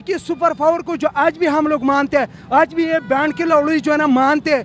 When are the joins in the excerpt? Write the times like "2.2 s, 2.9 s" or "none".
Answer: none